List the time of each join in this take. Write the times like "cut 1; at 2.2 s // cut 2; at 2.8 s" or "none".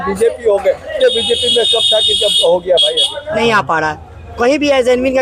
cut 1; at 3.4 s